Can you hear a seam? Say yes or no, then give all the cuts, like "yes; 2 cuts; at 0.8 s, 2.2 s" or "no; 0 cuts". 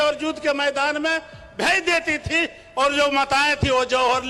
no; 0 cuts